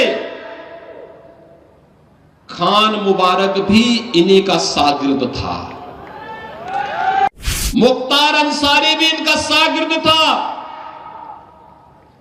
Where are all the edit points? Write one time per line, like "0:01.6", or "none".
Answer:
0:07.3